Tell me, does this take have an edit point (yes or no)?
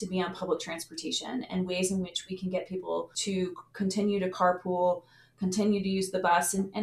yes